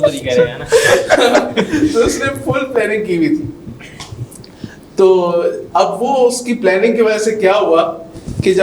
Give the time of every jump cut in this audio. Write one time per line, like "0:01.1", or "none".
none